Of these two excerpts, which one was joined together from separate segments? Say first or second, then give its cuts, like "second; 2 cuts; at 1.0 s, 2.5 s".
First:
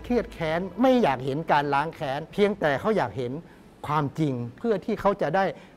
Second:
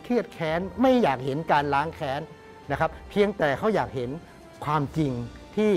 first; 2 cuts; at 2.2 s, 4.5 s